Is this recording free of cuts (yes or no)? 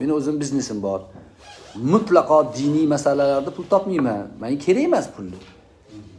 yes